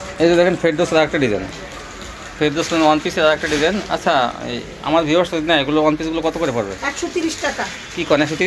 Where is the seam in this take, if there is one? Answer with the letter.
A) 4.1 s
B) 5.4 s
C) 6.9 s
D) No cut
D